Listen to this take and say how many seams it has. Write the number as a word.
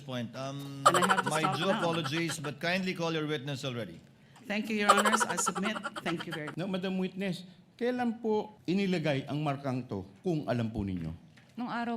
two